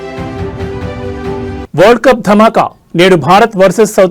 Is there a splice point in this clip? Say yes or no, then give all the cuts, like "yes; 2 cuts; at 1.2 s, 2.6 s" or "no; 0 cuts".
no; 0 cuts